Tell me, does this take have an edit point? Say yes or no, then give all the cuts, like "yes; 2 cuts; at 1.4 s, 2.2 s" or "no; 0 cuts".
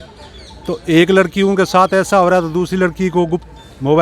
no; 0 cuts